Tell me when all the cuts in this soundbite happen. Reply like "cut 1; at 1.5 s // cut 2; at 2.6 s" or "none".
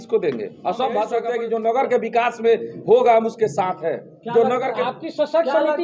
cut 1; at 1.3 s